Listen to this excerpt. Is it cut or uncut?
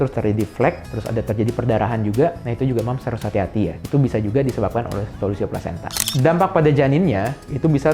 cut